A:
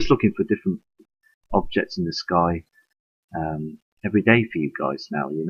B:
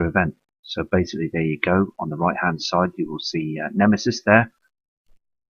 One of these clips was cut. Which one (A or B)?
B